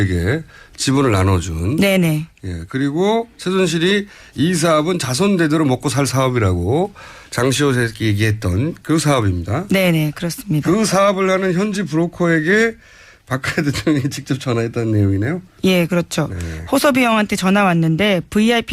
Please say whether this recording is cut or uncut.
cut